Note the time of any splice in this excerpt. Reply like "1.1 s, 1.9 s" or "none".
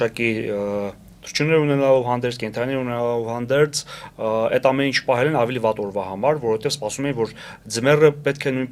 none